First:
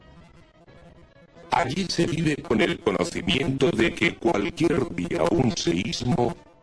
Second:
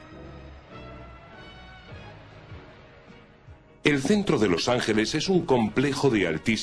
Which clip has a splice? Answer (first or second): second